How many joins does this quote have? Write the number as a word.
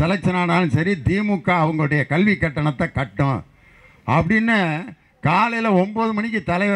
zero